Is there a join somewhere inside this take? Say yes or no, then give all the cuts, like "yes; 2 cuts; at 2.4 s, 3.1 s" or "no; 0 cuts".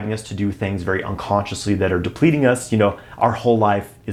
no; 0 cuts